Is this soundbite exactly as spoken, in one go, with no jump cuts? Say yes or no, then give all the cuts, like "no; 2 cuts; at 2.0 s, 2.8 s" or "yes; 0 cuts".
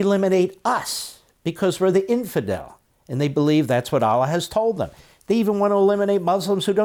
yes; 0 cuts